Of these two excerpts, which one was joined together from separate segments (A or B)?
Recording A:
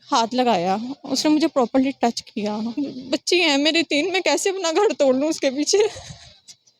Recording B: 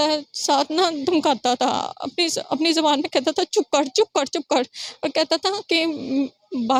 A